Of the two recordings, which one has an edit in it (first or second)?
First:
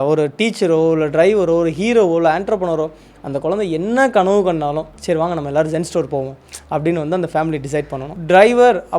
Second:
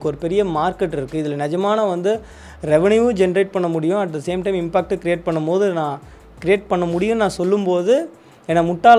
first